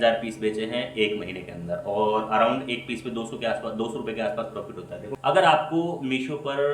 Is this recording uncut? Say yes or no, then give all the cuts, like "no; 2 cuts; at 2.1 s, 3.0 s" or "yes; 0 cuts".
no; 1 cut; at 5.1 s